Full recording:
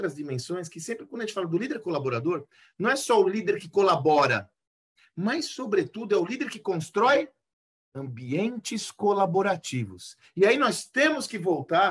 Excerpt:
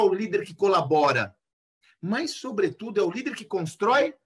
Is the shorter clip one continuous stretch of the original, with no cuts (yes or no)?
yes